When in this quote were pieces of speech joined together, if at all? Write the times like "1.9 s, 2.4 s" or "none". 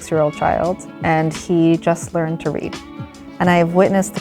none